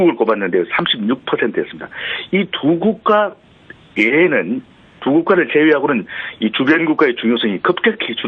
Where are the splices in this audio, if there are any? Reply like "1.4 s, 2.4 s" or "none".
6.8 s